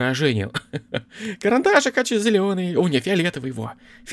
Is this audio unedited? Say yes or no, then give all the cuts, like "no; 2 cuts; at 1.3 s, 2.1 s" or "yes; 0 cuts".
yes; 0 cuts